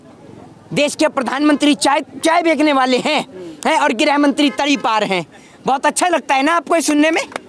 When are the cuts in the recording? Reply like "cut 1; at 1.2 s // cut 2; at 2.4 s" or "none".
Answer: none